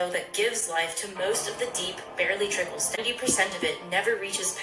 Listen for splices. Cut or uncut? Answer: cut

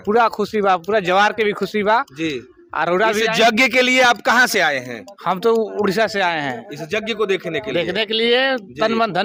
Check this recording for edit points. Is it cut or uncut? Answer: uncut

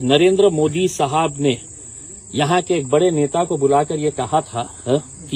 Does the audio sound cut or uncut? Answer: uncut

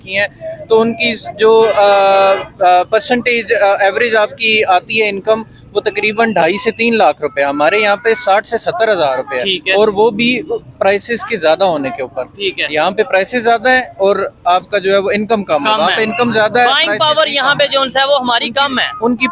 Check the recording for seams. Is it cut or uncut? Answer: uncut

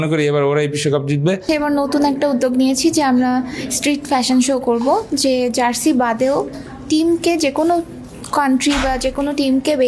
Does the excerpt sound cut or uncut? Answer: cut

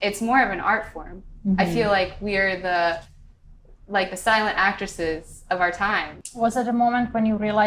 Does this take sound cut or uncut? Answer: cut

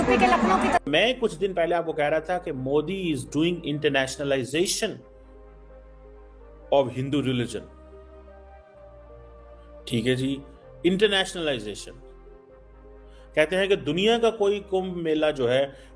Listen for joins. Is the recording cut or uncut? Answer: cut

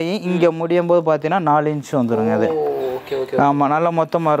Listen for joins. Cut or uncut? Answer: uncut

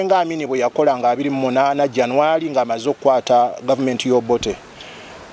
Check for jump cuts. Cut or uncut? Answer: uncut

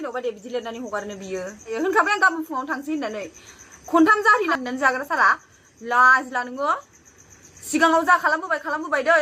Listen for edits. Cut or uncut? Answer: cut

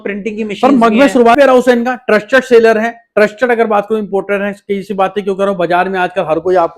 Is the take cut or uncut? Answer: cut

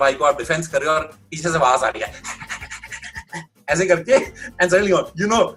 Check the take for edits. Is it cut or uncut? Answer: uncut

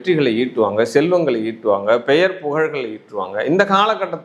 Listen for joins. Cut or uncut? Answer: uncut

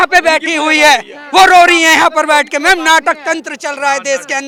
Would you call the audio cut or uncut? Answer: uncut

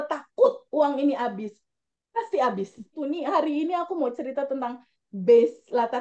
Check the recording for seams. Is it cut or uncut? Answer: cut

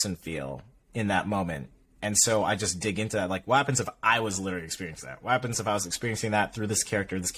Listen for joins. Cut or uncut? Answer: uncut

